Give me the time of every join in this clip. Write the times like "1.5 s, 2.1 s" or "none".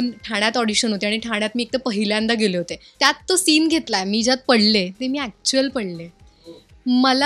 2.8 s